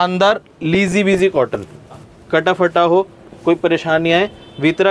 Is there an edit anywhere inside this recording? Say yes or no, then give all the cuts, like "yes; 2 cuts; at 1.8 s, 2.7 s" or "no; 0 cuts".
yes; 1 cut; at 2.1 s